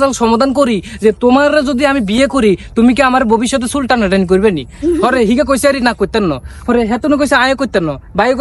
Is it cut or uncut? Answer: uncut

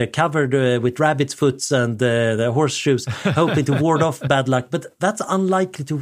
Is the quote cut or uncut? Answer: uncut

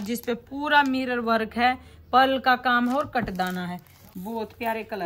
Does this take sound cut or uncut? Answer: cut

